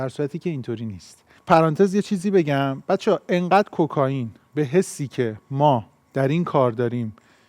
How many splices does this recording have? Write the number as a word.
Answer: one